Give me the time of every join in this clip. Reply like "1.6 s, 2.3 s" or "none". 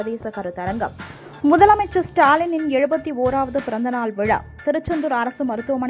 1.3 s